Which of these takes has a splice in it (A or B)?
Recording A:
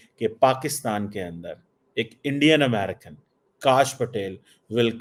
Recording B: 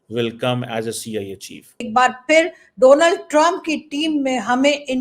B